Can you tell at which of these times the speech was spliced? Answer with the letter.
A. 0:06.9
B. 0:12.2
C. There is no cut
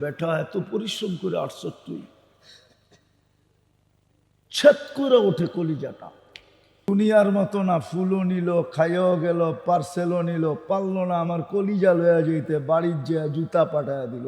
A